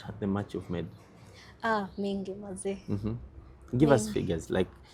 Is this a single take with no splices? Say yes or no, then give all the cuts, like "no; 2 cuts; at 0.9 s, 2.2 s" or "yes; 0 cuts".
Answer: yes; 0 cuts